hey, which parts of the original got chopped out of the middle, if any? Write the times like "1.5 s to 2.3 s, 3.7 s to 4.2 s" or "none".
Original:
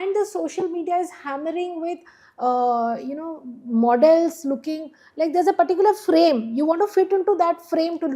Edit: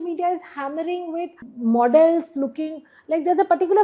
2.1 s to 3.5 s